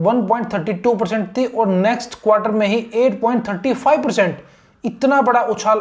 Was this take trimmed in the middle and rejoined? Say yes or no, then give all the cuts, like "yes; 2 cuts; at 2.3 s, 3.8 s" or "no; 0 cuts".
no; 0 cuts